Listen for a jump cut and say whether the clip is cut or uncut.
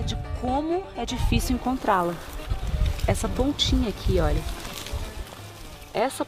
uncut